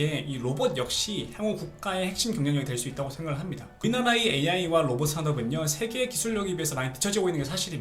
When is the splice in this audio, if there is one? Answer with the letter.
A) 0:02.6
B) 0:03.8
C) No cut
B